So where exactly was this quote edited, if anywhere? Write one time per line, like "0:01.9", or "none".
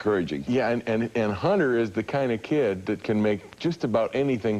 0:01.3